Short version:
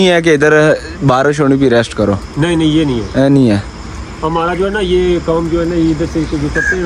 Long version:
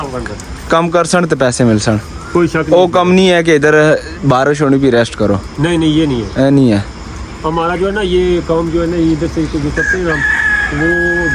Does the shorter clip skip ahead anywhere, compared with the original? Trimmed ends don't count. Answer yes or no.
no